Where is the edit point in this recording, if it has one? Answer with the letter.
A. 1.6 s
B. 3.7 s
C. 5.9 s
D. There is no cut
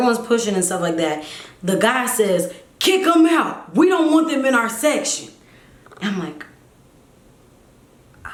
D